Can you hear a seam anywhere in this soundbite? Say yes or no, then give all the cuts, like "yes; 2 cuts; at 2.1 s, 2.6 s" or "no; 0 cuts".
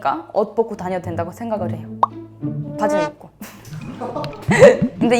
no; 0 cuts